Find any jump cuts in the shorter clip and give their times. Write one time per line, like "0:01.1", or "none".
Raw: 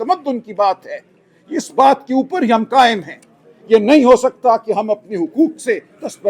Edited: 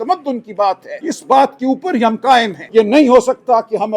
0:00.9
0:02.6